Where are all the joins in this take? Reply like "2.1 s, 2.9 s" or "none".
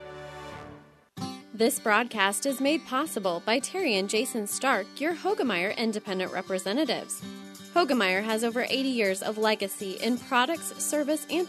1.4 s

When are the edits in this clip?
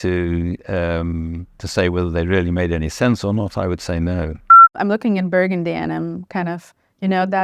4.8 s

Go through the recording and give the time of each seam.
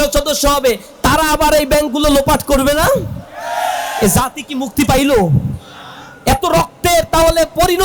none

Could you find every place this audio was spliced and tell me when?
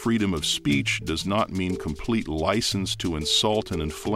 none

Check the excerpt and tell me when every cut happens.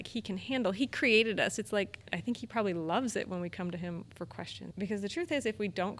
2.1 s, 4.6 s

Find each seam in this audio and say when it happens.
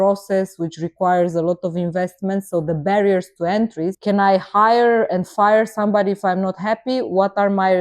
4.0 s

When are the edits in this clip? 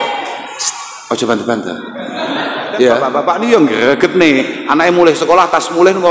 3.1 s

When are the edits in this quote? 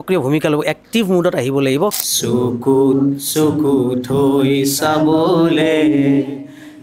2.1 s

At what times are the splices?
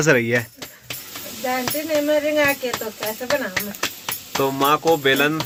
none

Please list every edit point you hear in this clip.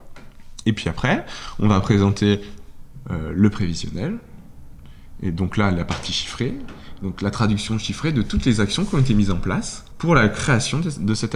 9.8 s

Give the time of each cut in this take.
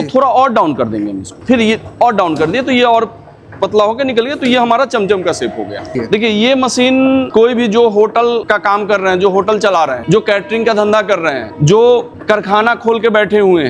1.3 s, 6.0 s, 7.3 s, 8.5 s, 10.0 s, 11.5 s, 12.1 s

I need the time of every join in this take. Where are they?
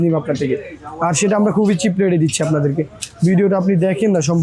none

